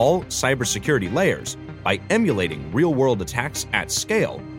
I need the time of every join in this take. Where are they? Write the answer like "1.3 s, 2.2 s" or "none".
none